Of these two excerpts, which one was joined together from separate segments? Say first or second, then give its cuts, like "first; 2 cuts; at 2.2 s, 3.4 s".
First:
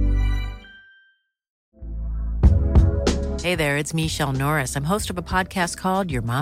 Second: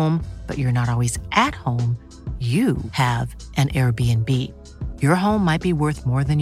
first; 1 cut; at 1.5 s